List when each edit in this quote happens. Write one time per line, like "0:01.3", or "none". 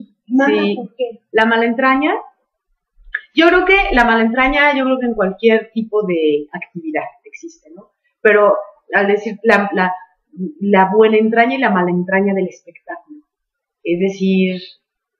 none

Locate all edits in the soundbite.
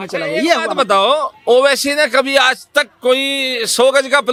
none

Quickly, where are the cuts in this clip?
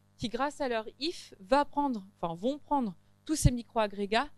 none

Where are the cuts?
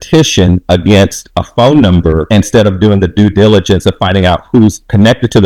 none

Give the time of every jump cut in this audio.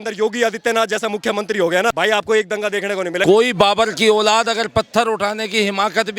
0:01.9
0:03.2

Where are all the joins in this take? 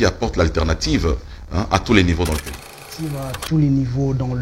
0:02.9

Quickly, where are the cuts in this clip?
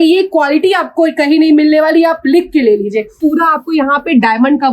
0:03.1

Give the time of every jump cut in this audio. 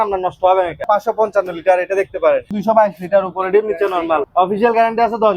0:00.8
0:02.5
0:04.3

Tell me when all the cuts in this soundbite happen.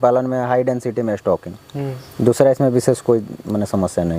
none

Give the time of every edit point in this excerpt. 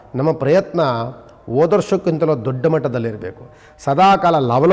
none

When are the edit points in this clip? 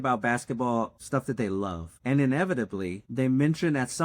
0:01.0
0:01.9
0:03.0

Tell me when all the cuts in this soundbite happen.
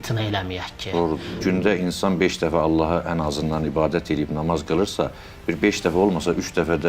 0:01.4

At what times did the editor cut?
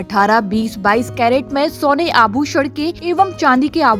0:03.0

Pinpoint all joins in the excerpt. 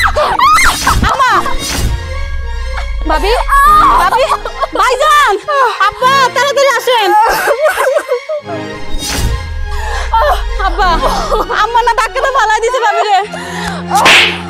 none

